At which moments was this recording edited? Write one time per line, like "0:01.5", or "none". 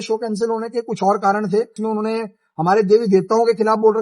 0:01.8